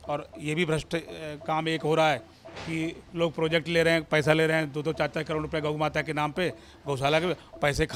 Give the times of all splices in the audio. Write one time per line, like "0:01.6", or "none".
none